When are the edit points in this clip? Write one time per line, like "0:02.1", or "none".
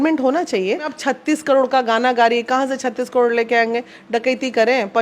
0:00.9